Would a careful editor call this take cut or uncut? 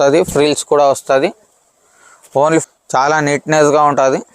cut